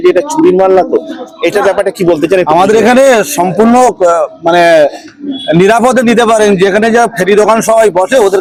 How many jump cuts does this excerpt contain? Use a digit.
0